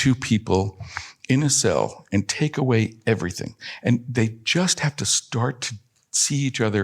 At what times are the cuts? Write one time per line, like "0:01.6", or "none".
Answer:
0:03.7